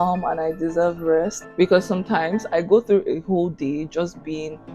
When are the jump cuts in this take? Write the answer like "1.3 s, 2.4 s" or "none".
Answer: 1.4 s